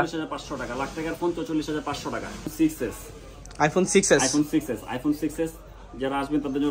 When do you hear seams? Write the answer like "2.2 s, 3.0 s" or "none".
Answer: 2.5 s